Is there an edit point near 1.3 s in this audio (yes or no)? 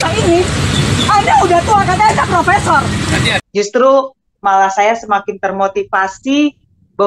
no